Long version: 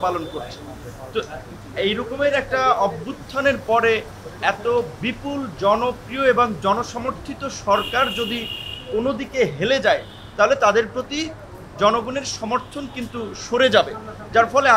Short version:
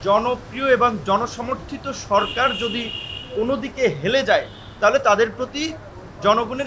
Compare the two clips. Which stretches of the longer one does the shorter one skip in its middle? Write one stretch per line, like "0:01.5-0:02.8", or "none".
none